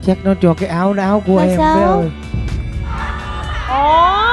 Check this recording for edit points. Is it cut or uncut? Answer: uncut